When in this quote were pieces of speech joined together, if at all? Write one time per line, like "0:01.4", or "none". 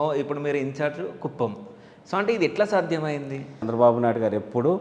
0:03.7